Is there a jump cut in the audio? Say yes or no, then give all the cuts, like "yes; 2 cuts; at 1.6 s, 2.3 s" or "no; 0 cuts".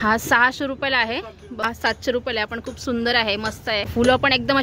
yes; 2 cuts; at 1.6 s, 3.9 s